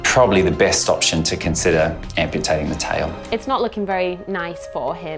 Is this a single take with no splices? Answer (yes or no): no